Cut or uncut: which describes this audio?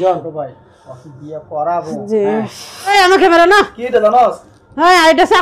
cut